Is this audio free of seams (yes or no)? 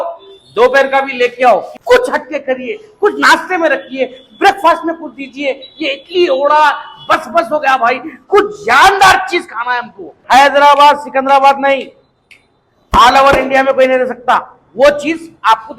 no